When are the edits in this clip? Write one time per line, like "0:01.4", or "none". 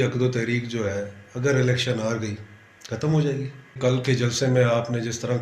0:03.7